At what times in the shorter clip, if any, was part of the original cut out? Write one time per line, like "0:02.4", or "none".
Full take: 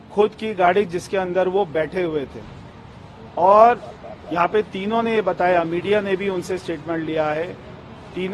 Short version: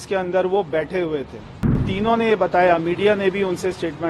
0:01.9